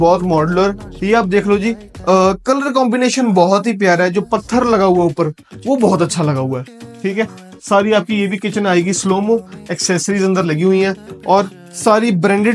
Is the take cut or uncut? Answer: uncut